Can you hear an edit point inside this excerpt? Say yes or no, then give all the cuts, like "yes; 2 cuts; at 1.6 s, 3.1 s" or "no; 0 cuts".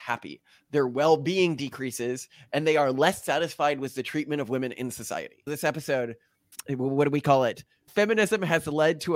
yes; 1 cut; at 5.5 s